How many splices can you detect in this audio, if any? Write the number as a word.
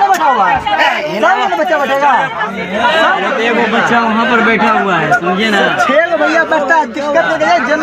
zero